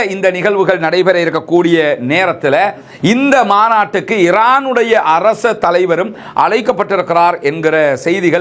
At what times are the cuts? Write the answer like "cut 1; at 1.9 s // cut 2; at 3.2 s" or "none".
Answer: cut 1; at 2.9 s

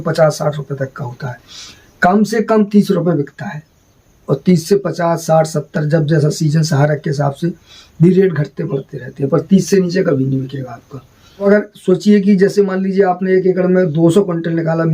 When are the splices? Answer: cut 1; at 11.4 s

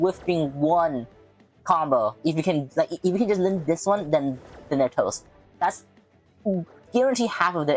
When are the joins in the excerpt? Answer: none

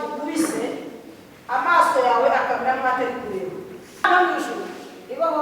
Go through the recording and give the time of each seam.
cut 1; at 4.0 s

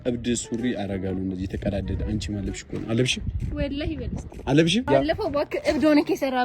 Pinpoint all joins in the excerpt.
cut 1; at 4.9 s

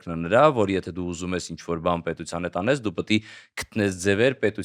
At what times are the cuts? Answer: none

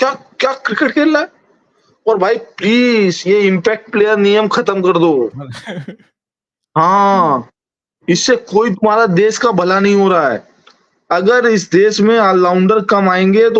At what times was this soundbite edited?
none

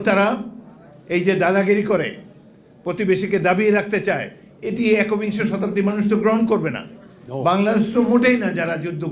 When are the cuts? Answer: none

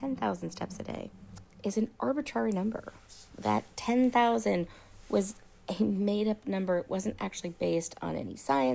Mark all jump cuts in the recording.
cut 1; at 3.7 s

